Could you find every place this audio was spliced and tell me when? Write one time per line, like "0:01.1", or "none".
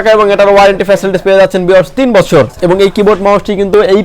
0:02.6